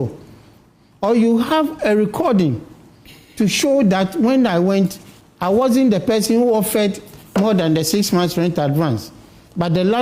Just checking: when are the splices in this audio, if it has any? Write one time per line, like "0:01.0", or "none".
none